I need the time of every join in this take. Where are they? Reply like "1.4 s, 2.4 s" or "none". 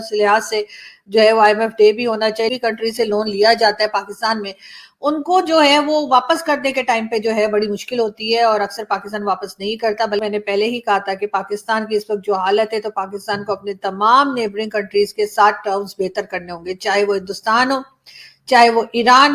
2.5 s, 10.2 s